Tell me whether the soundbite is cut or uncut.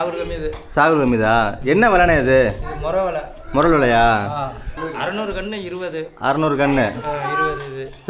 cut